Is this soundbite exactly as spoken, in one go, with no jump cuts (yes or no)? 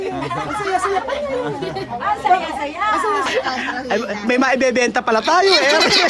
no